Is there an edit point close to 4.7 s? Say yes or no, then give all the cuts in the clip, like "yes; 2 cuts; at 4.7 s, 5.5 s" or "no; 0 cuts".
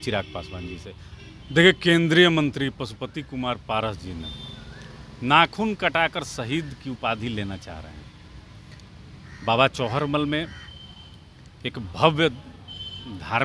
no; 1 cut; at 1.1 s